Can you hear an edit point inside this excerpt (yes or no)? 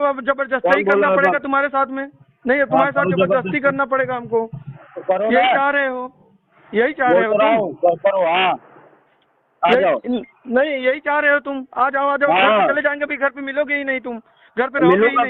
no